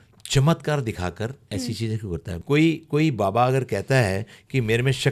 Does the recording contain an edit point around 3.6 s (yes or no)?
no